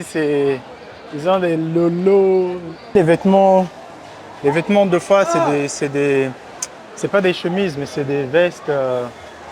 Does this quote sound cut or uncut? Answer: cut